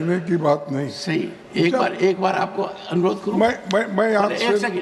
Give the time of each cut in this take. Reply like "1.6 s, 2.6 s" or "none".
none